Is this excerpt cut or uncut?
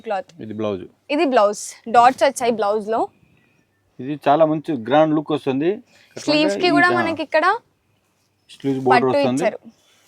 uncut